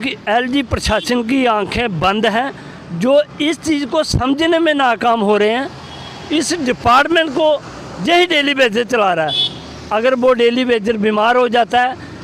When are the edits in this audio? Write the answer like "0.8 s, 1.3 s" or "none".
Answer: 6.7 s